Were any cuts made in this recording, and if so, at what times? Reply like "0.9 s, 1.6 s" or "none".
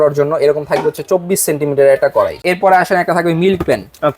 2.4 s

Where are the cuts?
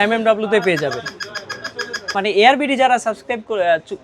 2.1 s

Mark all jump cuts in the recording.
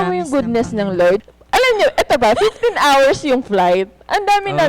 1.2 s

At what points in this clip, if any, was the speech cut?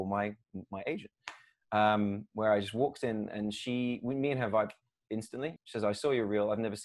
none

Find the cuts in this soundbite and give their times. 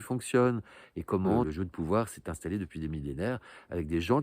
1.5 s

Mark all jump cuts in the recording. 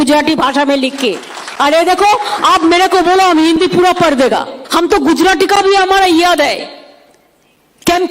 4.6 s

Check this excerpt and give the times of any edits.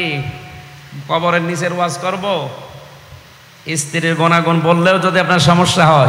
none

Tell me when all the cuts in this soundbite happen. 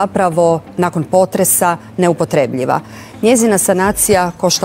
none

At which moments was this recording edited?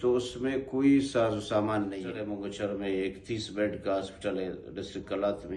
2.3 s

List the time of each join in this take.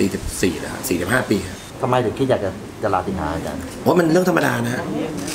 none

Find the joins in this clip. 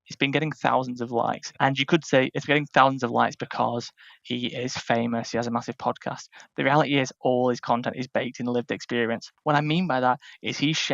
1.5 s, 9.3 s

